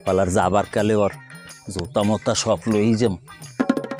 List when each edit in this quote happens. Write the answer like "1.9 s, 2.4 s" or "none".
none